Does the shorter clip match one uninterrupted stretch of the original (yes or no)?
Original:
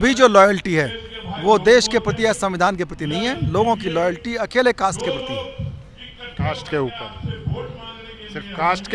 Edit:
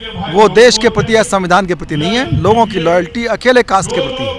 yes